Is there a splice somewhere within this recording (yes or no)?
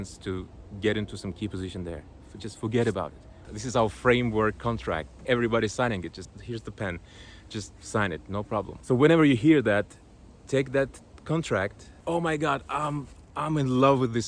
yes